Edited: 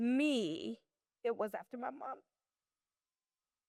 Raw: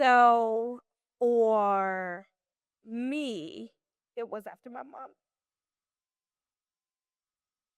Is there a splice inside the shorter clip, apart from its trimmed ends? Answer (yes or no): no